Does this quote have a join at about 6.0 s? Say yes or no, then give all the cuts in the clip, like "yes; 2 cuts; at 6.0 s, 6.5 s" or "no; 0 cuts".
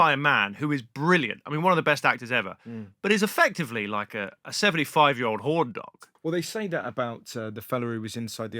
yes; 1 cut; at 6.0 s